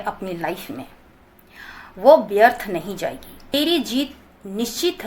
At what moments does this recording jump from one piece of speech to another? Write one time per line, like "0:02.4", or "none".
0:03.5